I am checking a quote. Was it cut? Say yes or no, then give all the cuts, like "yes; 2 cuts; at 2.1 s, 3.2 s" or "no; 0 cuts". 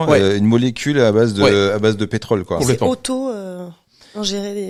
no; 0 cuts